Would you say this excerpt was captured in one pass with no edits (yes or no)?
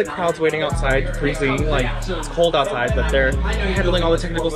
yes